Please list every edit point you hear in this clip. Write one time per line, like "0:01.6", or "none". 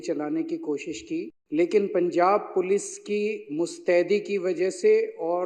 0:01.4